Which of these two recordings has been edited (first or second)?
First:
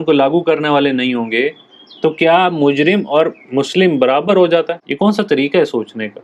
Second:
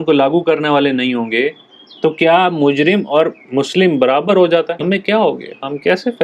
first